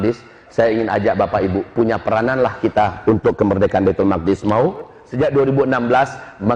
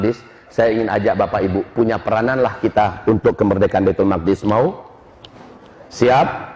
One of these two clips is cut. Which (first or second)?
first